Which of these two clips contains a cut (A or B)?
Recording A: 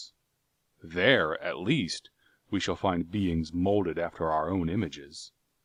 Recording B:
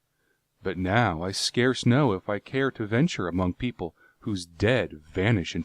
B